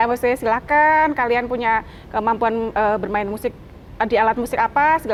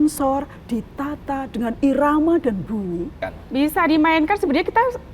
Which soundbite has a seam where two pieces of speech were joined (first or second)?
second